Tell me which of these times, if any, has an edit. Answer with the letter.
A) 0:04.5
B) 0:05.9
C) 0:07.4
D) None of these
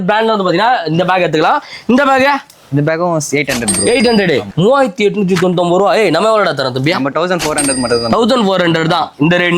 A